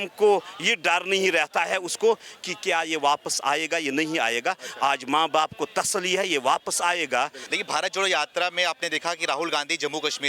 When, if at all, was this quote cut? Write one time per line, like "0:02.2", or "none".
0:07.5